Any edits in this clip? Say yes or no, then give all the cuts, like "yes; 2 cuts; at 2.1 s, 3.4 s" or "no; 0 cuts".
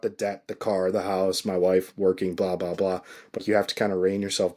yes; 1 cut; at 3.4 s